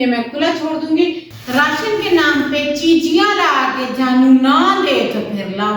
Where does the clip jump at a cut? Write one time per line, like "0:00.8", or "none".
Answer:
0:01.3